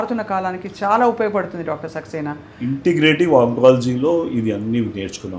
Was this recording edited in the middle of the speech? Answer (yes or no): no